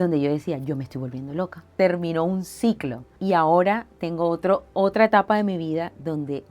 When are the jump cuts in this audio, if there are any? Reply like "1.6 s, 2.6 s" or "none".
1.8 s, 3.1 s